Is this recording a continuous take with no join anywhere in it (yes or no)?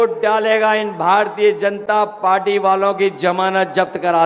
yes